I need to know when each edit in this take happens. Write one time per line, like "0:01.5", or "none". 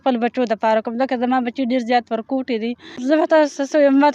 0:02.9